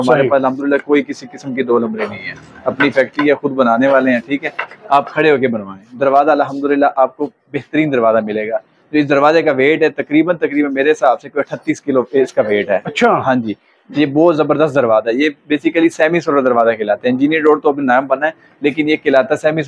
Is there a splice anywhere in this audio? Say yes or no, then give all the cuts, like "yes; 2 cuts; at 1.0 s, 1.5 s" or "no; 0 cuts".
no; 0 cuts